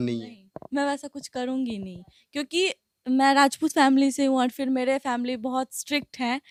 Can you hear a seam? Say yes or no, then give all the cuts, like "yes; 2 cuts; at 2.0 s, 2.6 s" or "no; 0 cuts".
no; 0 cuts